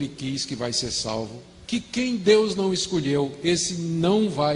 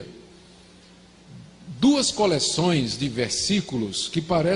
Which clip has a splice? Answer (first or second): second